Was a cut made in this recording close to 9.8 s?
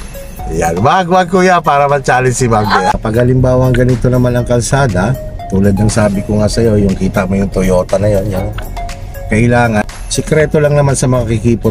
yes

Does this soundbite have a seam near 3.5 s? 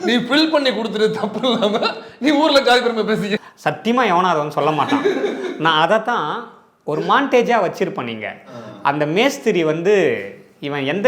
yes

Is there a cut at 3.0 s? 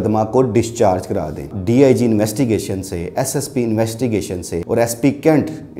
no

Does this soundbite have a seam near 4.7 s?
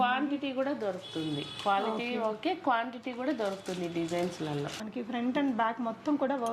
yes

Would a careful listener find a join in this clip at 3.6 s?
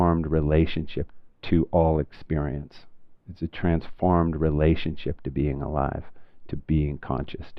no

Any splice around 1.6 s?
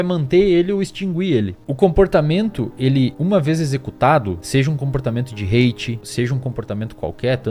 yes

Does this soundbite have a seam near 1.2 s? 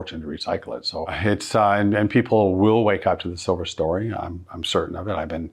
yes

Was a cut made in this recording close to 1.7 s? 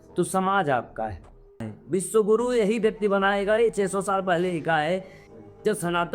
yes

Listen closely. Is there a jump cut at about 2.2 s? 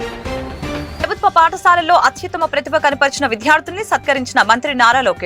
no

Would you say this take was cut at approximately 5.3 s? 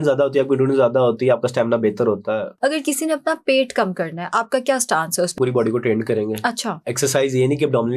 yes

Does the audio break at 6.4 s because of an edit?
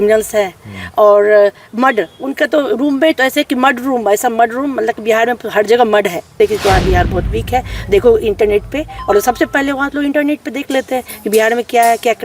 yes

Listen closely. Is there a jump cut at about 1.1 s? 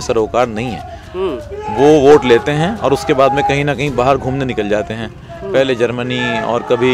no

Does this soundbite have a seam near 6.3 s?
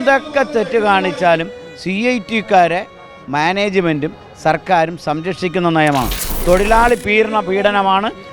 yes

